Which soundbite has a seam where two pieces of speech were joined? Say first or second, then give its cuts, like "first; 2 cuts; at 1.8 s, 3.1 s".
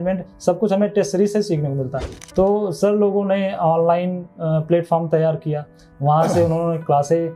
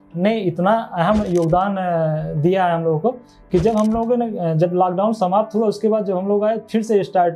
first; 1 cut; at 2.0 s